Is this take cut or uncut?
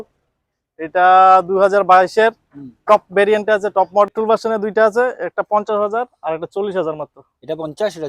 cut